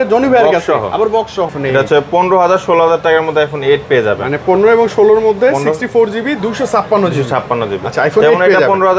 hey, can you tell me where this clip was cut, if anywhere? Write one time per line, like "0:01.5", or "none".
none